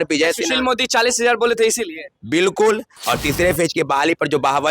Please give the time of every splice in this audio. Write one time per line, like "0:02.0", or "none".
0:02.9